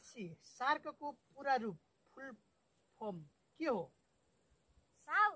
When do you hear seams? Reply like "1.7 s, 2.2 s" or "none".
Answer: none